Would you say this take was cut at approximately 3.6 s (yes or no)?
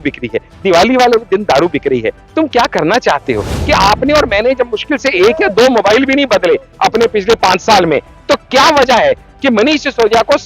yes